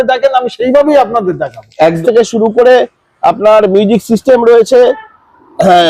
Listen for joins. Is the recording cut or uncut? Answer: cut